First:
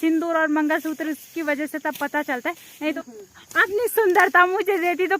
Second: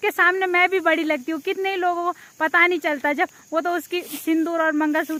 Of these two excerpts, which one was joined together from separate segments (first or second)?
first